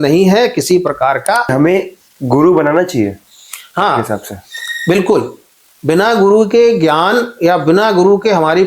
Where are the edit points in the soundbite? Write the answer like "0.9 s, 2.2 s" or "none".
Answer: 1.5 s